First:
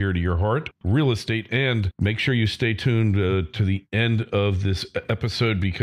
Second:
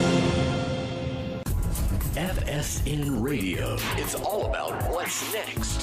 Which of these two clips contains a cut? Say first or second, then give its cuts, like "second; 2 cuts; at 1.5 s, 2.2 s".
second; 1 cut; at 1.4 s